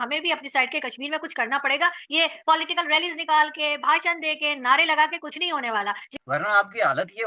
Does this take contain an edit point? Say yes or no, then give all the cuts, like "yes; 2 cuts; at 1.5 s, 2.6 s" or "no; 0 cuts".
yes; 1 cut; at 6.1 s